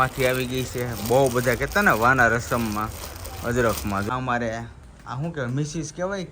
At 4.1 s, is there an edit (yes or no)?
yes